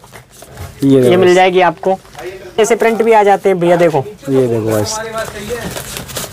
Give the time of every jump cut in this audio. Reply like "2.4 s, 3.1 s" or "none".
2.6 s